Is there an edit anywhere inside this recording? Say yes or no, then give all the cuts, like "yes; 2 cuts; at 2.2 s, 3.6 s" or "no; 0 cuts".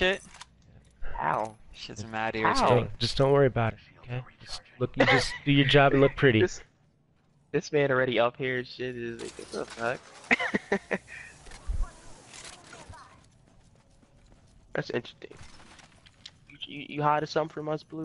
no; 0 cuts